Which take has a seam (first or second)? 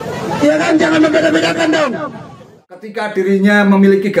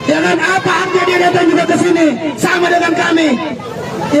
first